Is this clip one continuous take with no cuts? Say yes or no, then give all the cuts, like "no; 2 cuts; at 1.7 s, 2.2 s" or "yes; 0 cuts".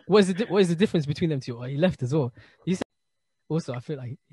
no; 1 cut; at 2.8 s